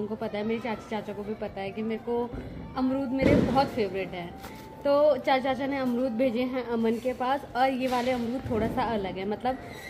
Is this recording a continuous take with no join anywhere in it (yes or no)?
yes